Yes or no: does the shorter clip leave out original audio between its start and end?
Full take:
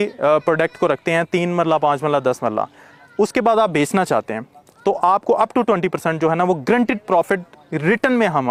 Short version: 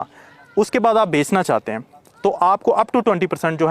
no